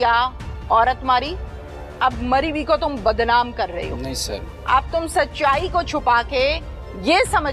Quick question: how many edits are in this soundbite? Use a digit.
0